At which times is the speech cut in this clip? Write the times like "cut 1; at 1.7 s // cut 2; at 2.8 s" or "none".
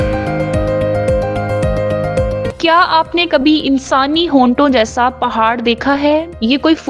cut 1; at 2.4 s